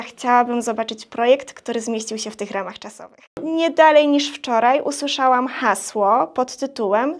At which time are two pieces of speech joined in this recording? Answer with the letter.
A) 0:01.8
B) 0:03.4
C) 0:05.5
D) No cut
B